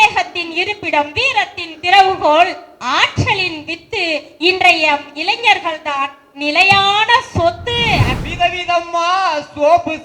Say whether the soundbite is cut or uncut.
cut